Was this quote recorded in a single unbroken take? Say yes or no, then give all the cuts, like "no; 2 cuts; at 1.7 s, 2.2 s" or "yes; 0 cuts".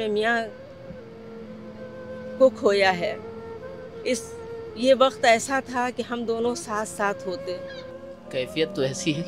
no; 1 cut; at 7.9 s